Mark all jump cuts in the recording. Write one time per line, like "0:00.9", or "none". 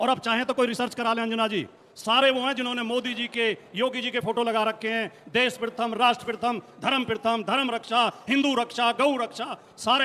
none